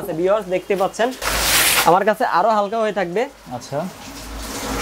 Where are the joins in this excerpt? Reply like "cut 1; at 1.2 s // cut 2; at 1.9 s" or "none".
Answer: cut 1; at 1.2 s